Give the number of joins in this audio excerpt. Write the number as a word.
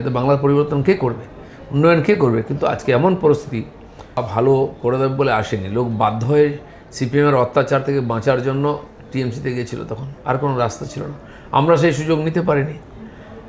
one